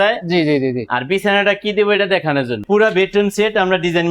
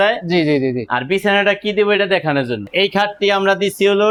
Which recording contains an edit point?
first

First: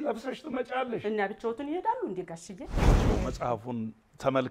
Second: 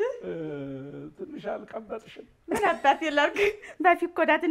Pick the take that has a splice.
first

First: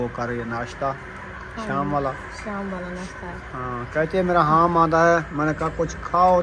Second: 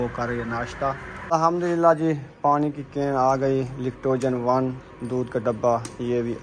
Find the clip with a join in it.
second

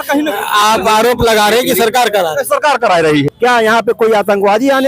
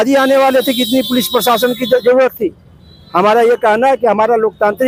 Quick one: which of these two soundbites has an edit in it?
first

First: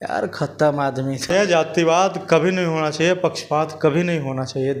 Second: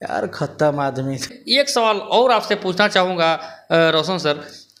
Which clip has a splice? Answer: first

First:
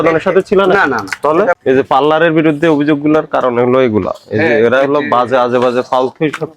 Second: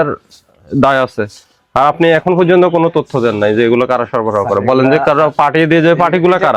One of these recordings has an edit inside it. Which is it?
first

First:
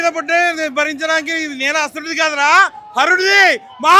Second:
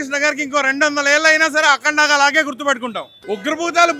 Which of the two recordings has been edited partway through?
second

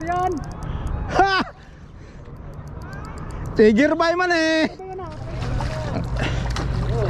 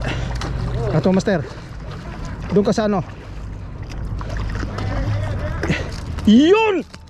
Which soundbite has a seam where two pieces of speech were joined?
first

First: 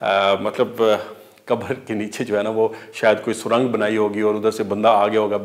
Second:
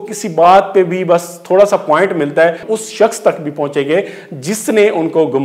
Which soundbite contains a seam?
second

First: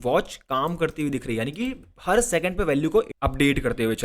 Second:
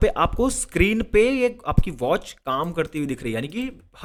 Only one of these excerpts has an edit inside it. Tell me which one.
first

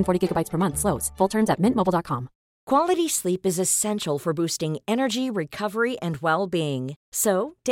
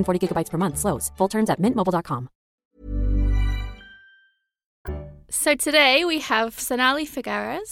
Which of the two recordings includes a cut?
first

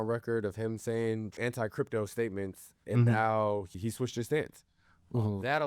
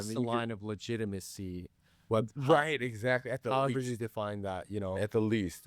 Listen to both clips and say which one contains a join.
first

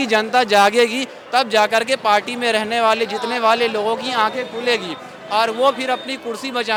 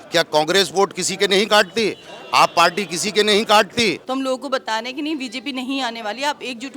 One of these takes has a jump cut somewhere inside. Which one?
second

